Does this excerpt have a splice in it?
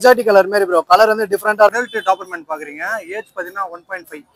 yes; 1 cut; at 1.7 s

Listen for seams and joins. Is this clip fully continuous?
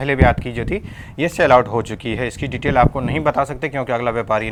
yes; 0 cuts

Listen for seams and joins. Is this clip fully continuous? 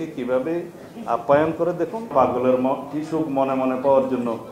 no; 1 cut; at 2.1 s

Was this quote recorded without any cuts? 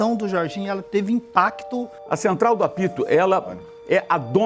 no; 1 cut; at 2.0 s

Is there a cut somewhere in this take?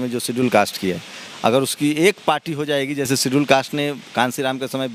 no; 0 cuts

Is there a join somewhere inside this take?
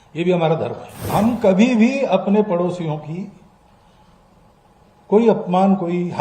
yes; 1 cut; at 1.1 s

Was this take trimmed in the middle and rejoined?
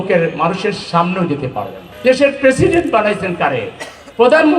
yes; 1 cut; at 1.8 s

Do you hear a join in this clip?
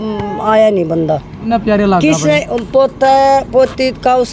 yes; 1 cut; at 1.4 s

